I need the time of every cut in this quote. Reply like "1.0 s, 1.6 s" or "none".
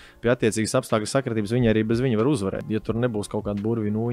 2.6 s